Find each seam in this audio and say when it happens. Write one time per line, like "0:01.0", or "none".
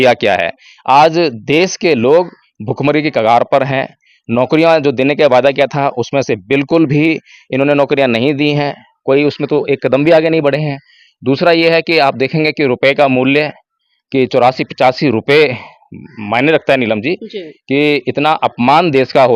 none